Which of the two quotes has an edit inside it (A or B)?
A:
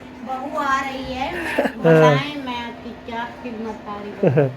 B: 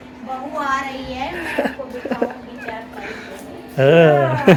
A